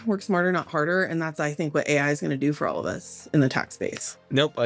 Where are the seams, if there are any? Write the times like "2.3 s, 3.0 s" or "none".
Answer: 3.7 s